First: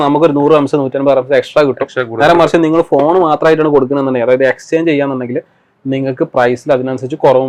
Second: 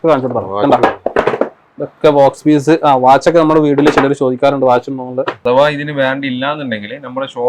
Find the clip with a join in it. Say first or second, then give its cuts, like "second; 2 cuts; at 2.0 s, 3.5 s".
second; 1 cut; at 5.4 s